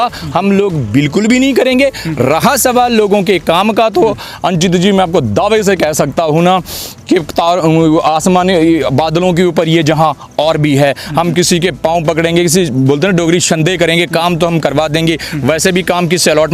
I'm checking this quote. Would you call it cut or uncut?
uncut